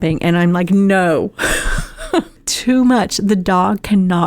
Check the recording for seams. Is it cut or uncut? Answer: cut